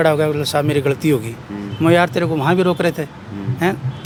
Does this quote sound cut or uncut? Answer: uncut